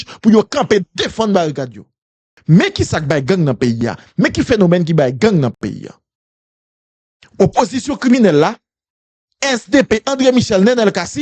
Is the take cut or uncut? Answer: cut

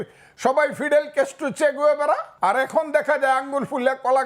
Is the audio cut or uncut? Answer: cut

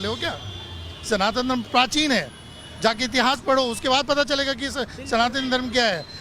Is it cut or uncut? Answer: uncut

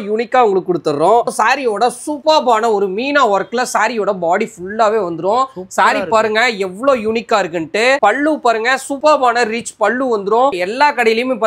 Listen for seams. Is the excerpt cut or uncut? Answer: cut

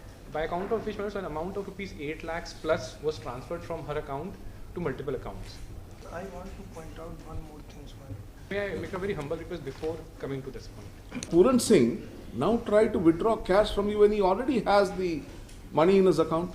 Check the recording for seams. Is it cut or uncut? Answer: cut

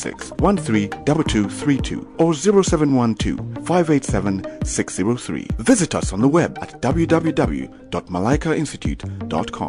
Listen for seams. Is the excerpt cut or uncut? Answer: uncut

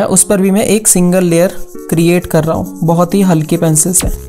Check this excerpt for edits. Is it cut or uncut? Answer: uncut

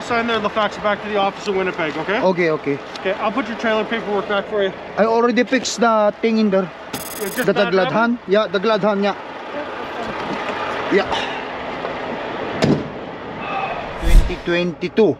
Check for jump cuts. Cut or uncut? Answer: cut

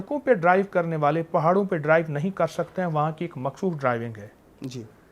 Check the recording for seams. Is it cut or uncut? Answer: uncut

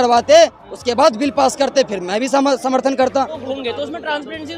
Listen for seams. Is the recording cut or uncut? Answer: cut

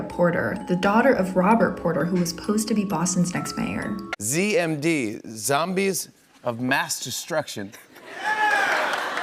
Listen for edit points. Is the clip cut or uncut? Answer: cut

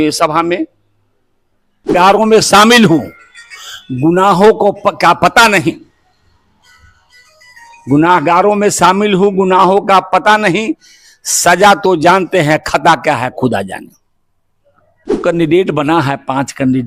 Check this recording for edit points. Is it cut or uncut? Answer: cut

